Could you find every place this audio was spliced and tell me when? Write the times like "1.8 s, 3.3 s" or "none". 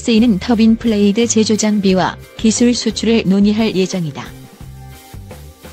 4.2 s